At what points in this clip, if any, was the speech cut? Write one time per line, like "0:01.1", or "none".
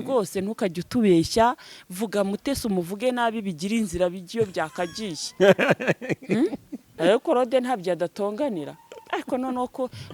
0:06.9